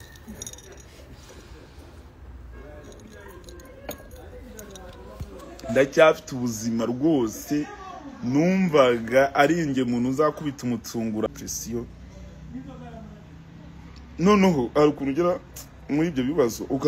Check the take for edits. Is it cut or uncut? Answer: cut